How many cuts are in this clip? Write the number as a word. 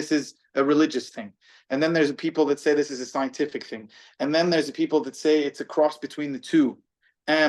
zero